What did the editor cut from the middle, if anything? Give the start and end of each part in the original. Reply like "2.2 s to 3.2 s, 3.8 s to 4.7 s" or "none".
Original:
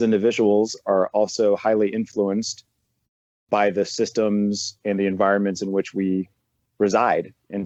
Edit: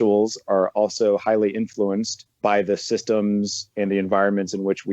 2.6 s to 3.3 s